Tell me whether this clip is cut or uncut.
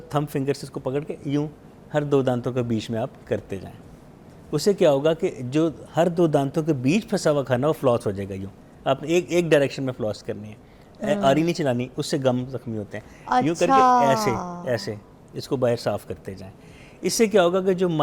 uncut